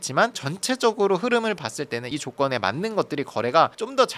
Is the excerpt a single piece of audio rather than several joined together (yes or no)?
yes